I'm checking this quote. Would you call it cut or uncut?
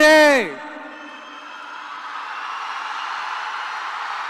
uncut